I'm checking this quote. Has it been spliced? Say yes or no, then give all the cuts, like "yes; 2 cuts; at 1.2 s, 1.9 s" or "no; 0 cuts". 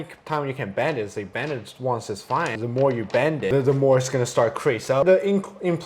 yes; 3 cuts; at 2.6 s, 3.5 s, 5.0 s